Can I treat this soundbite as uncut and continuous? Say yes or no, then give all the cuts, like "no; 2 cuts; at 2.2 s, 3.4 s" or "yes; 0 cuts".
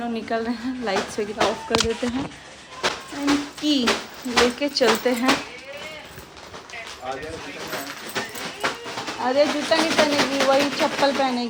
yes; 0 cuts